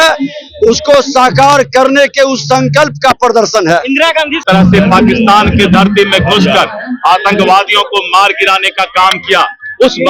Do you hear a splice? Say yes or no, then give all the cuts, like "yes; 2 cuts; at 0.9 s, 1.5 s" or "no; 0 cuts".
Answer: yes; 1 cut; at 4.4 s